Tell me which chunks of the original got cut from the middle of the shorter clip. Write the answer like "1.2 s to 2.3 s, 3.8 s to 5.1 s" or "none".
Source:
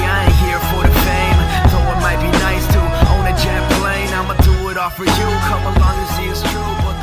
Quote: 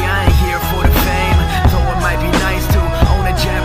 none